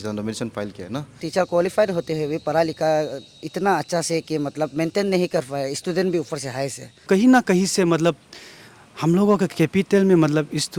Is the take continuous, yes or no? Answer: no